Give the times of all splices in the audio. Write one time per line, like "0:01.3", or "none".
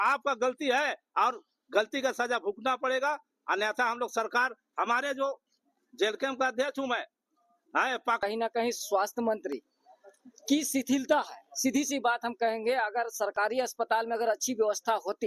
0:08.2